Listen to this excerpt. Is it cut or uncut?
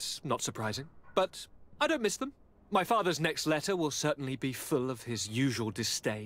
uncut